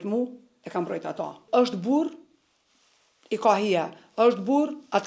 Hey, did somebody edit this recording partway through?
yes; 1 cut; at 1.4 s

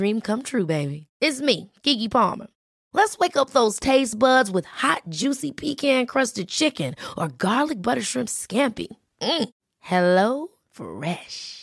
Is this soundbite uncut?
yes; 0 cuts

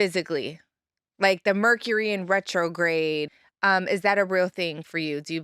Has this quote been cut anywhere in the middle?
yes; 1 cut; at 3.3 s

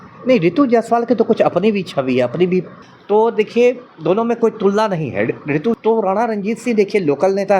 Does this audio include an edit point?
yes; 2 cuts; at 2.8 s, 5.8 s

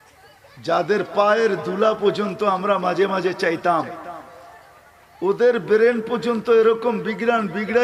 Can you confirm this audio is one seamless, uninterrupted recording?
yes; 0 cuts

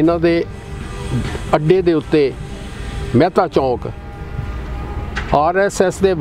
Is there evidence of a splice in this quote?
no; 0 cuts

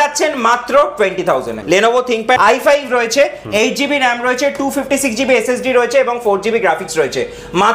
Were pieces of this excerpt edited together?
yes; 2 cuts; at 1.5 s, 2.4 s

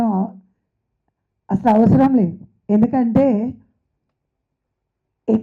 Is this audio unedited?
yes; 0 cuts

